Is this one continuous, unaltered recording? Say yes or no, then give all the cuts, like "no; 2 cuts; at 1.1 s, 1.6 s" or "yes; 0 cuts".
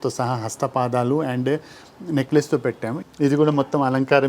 no; 1 cut; at 2.9 s